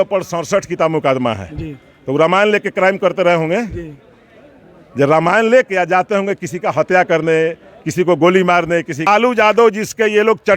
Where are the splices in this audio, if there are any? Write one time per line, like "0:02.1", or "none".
0:09.1